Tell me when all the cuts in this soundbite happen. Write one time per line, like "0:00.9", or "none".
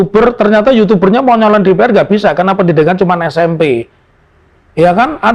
none